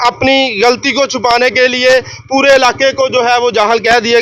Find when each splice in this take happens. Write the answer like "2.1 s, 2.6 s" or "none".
none